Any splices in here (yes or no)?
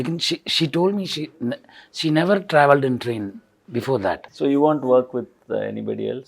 yes